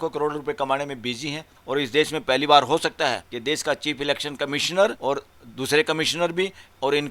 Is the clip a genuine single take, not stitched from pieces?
no; 3 cuts; at 1.5 s, 3.3 s, 5.0 s

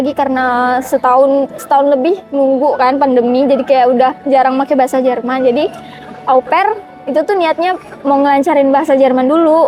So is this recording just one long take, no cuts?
yes; 0 cuts

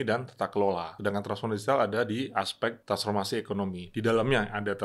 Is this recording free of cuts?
no; 2 cuts; at 0.9 s, 2.8 s

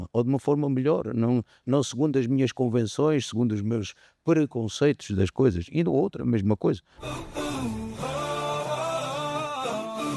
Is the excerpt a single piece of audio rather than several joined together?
no; 1 cut; at 6.9 s

